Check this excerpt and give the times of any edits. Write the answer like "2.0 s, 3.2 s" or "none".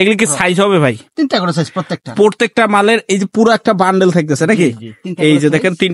none